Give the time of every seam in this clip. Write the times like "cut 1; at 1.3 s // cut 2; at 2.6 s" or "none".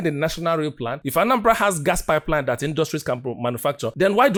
none